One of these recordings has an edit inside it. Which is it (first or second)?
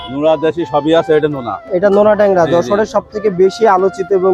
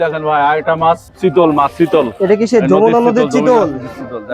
second